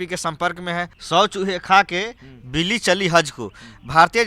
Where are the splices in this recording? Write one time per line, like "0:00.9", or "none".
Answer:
0:01.0